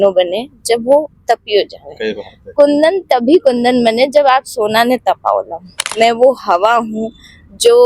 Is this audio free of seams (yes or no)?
no